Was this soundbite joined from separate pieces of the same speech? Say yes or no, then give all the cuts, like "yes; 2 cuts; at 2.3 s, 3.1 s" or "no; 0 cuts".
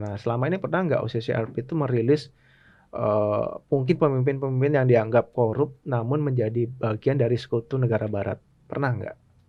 no; 0 cuts